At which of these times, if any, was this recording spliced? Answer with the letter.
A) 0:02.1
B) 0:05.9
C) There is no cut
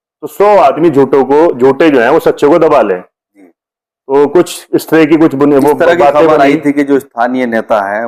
C